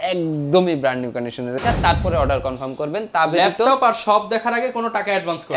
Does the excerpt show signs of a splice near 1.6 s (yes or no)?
yes